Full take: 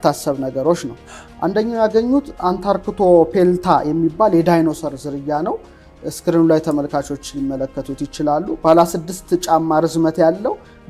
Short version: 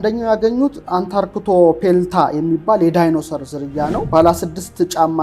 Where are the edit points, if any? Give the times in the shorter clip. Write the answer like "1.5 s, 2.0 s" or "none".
4.1 s